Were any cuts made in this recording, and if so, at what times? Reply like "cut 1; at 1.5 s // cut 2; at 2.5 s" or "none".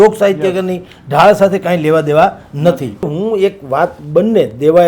cut 1; at 3.1 s